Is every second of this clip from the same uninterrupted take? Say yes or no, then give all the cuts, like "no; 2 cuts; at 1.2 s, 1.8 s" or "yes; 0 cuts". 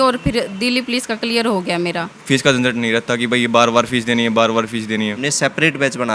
no; 2 cuts; at 2.1 s, 5.3 s